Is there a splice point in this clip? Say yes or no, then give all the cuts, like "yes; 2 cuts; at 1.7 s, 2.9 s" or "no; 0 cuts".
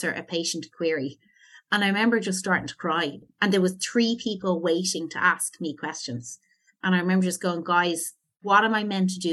yes; 2 cuts; at 3.2 s, 8.4 s